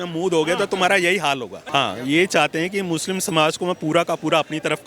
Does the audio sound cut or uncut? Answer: cut